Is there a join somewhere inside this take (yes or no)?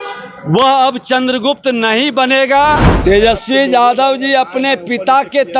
yes